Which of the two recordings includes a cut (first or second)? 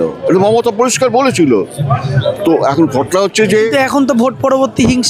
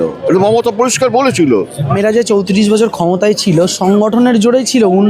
second